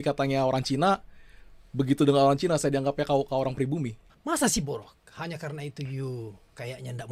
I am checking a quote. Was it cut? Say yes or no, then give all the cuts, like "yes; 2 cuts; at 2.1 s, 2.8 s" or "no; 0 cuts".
no; 0 cuts